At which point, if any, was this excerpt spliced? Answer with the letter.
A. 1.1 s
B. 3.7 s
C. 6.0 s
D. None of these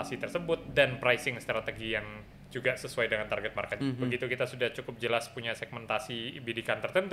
B